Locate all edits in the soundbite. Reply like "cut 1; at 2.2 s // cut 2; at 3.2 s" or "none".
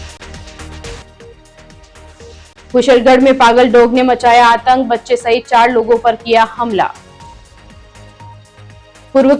cut 1; at 1.0 s